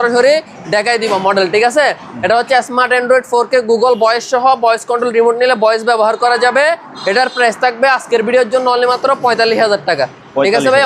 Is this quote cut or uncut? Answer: uncut